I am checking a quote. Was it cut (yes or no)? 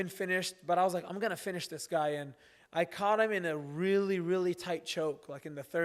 no